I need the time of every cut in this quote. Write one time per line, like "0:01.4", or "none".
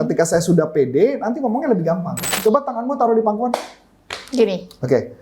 0:02.2